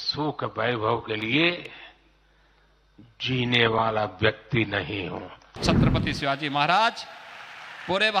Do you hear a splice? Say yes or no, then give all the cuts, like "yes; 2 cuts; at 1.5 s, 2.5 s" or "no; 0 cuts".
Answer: yes; 1 cut; at 5.6 s